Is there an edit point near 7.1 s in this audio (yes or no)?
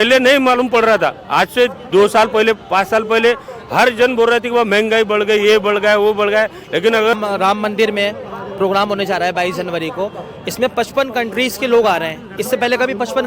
yes